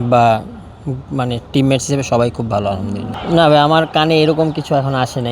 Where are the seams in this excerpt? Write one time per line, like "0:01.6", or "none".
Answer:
0:03.1